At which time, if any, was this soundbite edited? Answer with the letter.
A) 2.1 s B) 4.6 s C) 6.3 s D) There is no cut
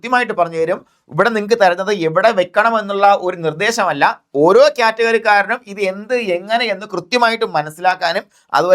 D